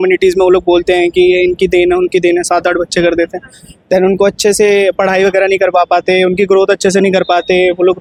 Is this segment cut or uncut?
uncut